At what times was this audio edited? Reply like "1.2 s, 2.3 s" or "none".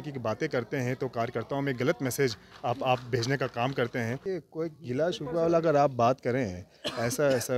4.2 s